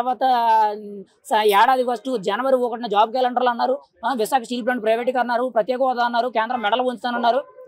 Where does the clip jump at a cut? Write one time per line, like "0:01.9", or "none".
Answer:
none

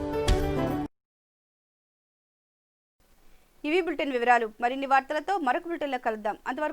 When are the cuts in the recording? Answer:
none

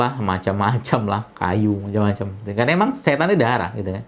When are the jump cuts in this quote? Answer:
none

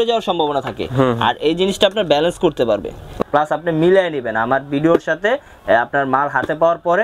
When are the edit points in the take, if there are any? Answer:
0:03.1

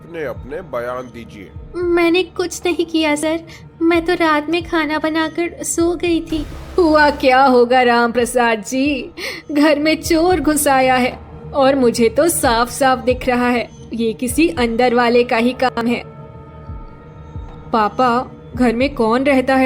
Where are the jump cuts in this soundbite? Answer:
0:01.6
0:06.6

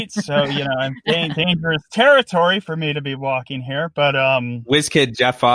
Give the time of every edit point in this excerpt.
0:04.6

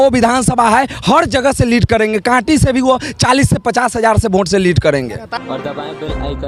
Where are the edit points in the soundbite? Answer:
0:05.2

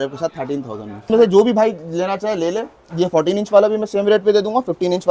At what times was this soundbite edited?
0:01.0

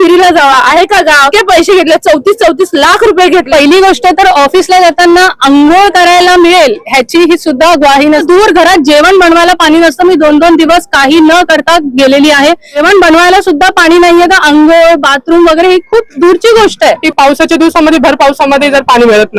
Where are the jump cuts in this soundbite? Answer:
0:01.3
0:03.5
0:08.2
0:12.8
0:17.1

